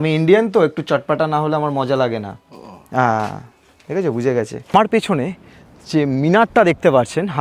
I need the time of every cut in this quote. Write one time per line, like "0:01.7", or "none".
0:04.6